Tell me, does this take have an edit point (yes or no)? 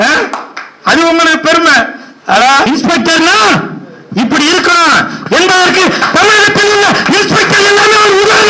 yes